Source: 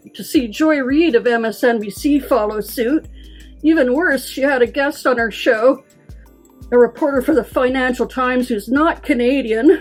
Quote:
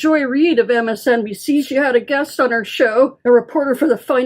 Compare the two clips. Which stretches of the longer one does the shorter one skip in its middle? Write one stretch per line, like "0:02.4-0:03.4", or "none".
0:02.2-0:04.3
0:05.8-0:06.6